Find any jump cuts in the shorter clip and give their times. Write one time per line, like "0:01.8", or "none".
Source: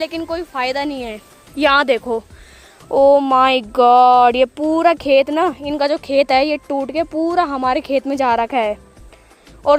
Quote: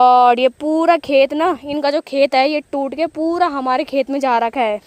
none